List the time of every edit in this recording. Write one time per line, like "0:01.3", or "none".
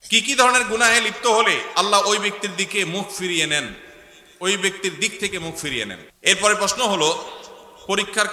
0:06.0